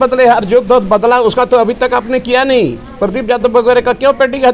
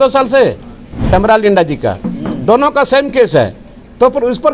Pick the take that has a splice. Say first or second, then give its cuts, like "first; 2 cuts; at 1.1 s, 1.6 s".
second; 1 cut; at 1.0 s